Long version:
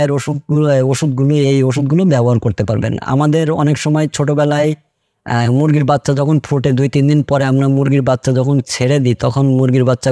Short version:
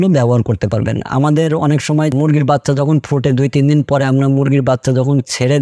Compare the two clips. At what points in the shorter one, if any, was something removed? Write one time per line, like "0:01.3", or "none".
0:02.1